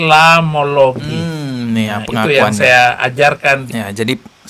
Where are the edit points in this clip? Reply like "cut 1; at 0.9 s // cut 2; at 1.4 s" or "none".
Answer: none